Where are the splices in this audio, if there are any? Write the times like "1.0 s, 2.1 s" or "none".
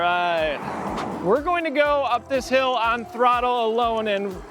1.0 s

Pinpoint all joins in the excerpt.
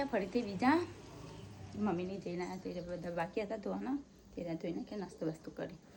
none

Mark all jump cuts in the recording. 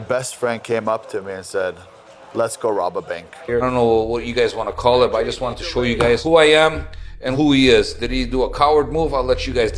3.4 s

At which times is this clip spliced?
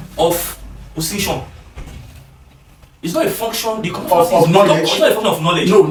none

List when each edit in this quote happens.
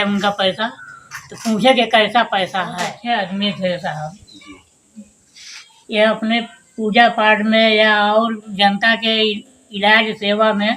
2.9 s

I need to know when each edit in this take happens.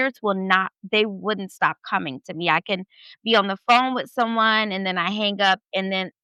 none

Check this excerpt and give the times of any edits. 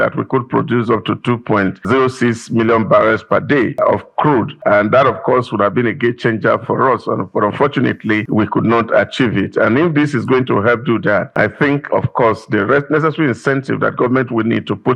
1.9 s, 4.1 s, 8.2 s, 11.3 s

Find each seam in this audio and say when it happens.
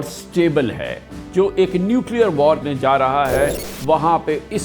1.2 s, 2.6 s

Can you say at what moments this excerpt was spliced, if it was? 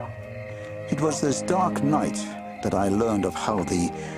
3.3 s

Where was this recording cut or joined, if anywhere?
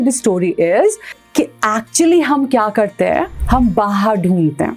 3.4 s

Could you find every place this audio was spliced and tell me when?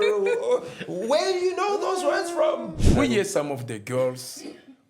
2.7 s

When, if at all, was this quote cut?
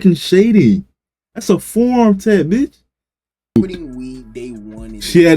3.6 s

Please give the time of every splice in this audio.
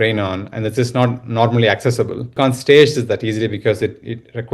2.3 s

